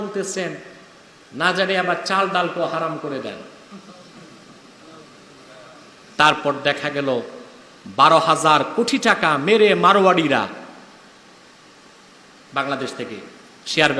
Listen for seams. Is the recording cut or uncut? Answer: uncut